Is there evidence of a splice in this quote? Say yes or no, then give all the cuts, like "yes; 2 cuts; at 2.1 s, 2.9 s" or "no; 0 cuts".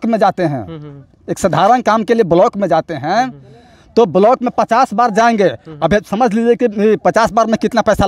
no; 0 cuts